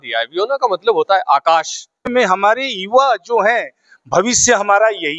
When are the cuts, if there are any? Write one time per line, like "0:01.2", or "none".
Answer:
0:02.1